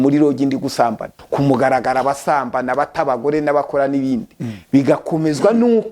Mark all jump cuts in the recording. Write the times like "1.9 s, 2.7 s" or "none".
1.2 s